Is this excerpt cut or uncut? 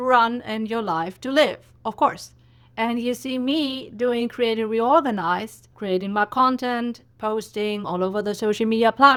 uncut